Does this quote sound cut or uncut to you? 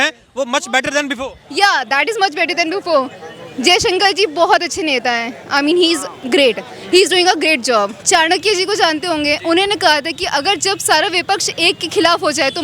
cut